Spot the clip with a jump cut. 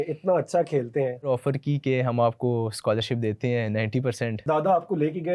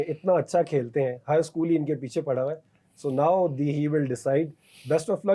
first; 2 cuts; at 1.3 s, 4.4 s

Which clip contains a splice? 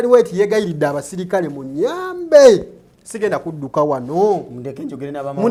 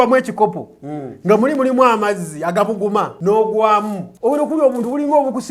second; 2 cuts; at 3.1 s, 4.0 s

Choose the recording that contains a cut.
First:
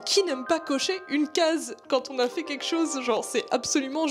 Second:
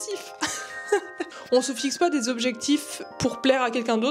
second; 1 cut; at 1.0 s

